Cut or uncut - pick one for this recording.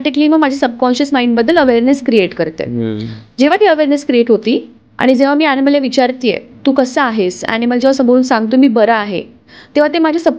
uncut